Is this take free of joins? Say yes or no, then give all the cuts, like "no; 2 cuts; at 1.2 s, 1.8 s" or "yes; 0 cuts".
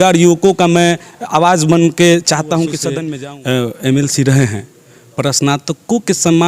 no; 1 cut; at 3.0 s